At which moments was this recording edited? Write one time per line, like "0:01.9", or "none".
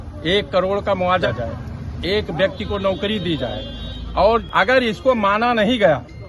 0:01.2
0:04.5